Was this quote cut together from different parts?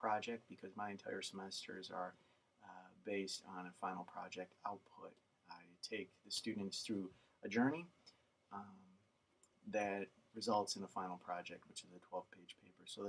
yes; 1 cut; at 7.2 s

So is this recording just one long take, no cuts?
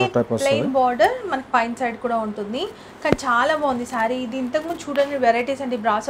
yes; 0 cuts

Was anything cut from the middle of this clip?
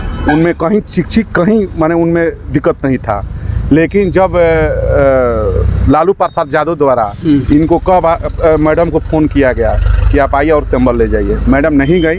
no; 0 cuts

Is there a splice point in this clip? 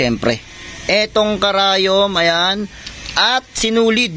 no; 0 cuts

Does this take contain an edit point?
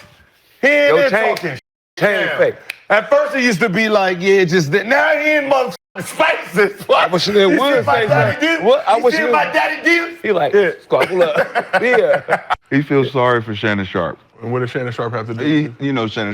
yes; 2 cuts; at 12.6 s, 14.3 s

